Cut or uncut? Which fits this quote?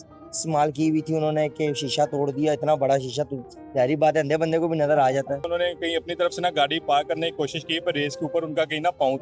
cut